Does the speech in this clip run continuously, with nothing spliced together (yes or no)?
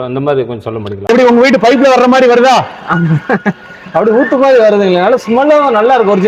no